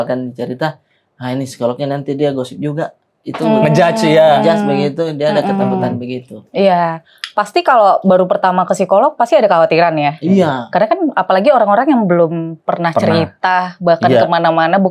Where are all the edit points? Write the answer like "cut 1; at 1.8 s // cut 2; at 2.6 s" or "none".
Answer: none